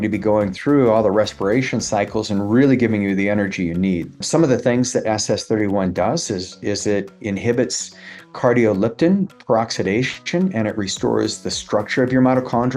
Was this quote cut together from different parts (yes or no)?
yes